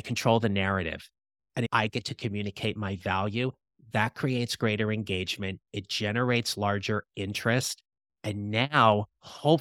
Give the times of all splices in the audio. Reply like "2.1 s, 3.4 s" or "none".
1.7 s

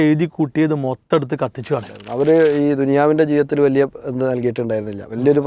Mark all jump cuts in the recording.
2.0 s

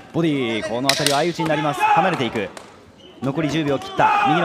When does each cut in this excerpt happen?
none

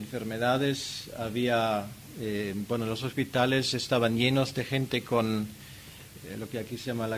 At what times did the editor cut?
1.2 s

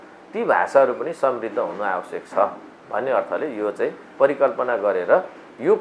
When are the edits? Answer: none

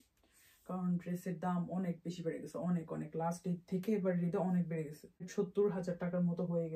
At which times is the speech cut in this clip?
5.3 s

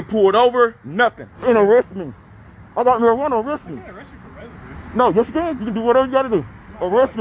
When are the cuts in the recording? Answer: 1.3 s

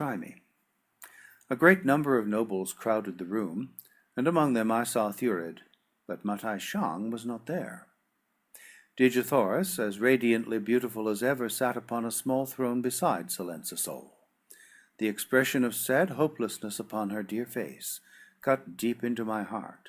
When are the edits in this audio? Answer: none

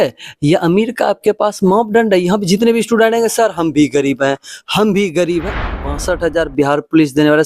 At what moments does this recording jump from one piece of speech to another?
5.9 s

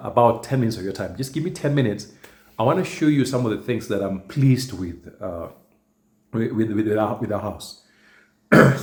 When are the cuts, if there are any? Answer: none

